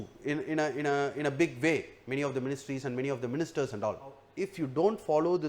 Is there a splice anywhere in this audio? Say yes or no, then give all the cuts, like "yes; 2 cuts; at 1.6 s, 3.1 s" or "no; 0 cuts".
yes; 1 cut; at 4.3 s